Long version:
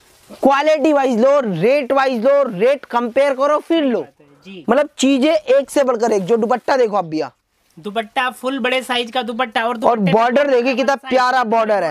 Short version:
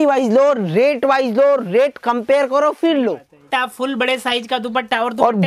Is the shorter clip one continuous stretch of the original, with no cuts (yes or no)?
no